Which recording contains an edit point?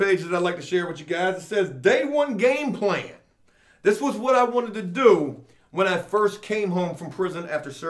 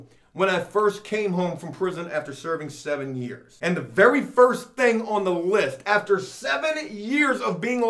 second; 1 cut; at 3.4 s

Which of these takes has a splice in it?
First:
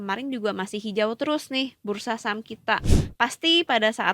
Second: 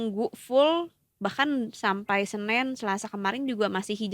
first; 1 cut; at 2.9 s

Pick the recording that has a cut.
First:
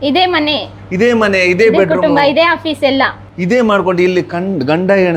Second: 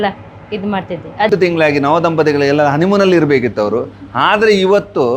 second; 1 cut; at 1.3 s

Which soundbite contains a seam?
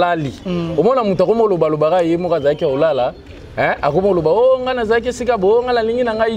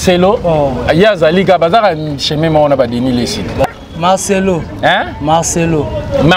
second; 1 cut; at 3.6 s

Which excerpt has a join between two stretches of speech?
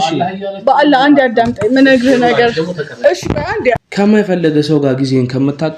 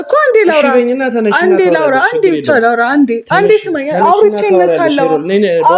first; 1 cut; at 3.8 s

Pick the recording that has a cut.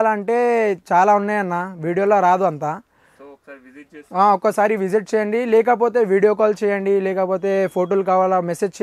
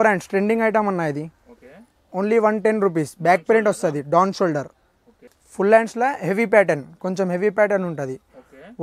second; 1 cut; at 5.4 s

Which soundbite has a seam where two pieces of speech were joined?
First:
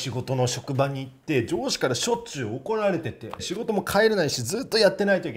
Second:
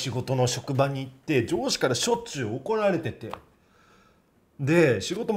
first; 1 cut; at 3.5 s

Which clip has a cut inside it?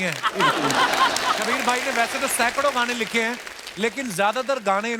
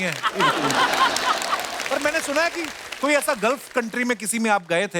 first; 1 cut; at 1.5 s

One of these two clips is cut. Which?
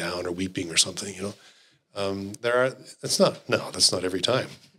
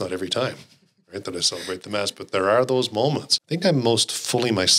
second; 1 cut; at 3.3 s

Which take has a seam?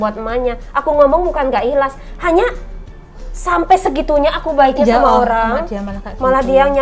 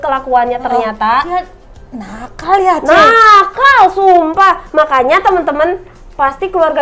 second; 1 cut; at 1.3 s

